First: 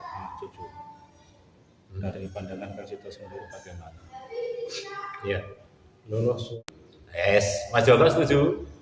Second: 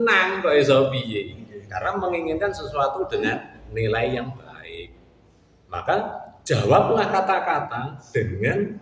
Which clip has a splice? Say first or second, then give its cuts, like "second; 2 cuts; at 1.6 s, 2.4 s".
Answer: first; 1 cut; at 6.5 s